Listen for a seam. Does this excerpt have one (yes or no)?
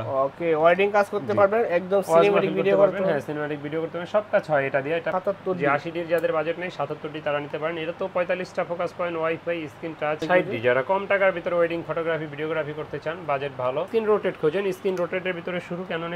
yes